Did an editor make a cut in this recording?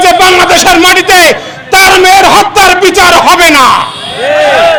no; 0 cuts

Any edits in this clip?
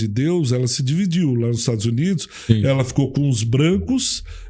no; 0 cuts

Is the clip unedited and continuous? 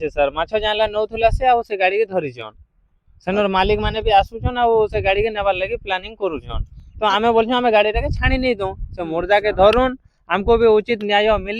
yes; 0 cuts

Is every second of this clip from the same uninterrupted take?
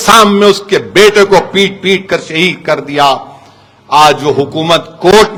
yes; 0 cuts

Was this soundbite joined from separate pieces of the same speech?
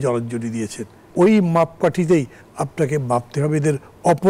yes; 1 cut; at 1.1 s

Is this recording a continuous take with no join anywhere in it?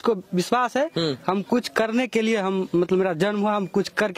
yes; 0 cuts

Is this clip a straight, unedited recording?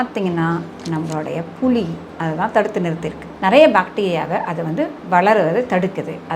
no; 1 cut; at 3.3 s

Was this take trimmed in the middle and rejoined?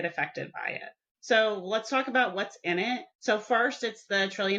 no; 0 cuts

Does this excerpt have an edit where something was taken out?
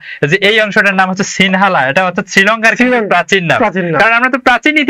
no; 0 cuts

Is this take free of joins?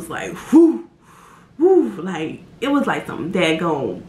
yes; 0 cuts

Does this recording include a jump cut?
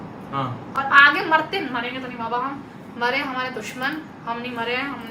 no; 0 cuts

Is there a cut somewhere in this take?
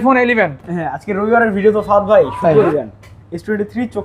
yes; 1 cut; at 2.7 s

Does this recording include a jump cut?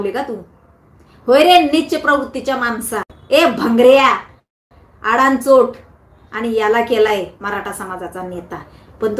no; 0 cuts

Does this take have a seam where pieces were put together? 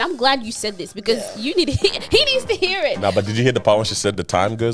no; 0 cuts

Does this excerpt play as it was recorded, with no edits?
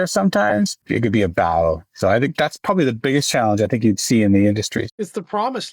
no; 2 cuts; at 0.8 s, 4.8 s

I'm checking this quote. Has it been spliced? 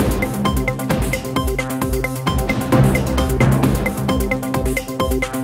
no; 0 cuts

